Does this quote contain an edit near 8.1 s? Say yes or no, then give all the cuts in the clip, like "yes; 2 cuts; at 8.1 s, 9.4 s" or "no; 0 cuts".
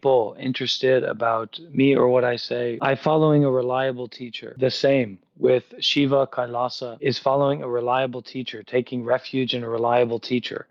no; 3 cuts; at 2.8 s, 4.5 s, 6.9 s